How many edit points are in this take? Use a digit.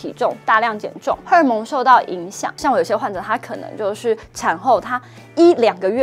2